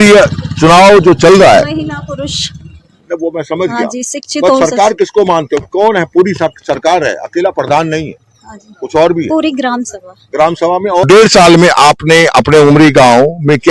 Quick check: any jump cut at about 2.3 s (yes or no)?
no